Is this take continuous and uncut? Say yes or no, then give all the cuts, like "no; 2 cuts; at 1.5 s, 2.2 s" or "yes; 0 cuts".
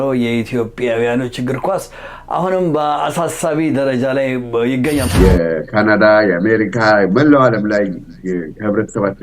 no; 1 cut; at 5.1 s